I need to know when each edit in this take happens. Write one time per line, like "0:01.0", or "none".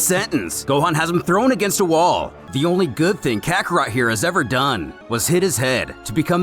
0:02.4
0:05.0